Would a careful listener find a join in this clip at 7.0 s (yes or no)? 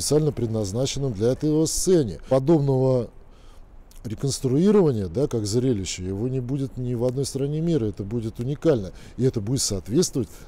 no